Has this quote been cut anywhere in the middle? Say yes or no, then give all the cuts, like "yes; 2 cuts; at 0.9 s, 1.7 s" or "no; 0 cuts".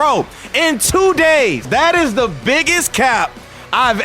yes; 1 cut; at 1.7 s